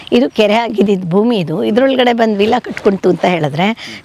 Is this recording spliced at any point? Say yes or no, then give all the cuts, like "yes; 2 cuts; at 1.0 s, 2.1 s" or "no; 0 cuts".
no; 0 cuts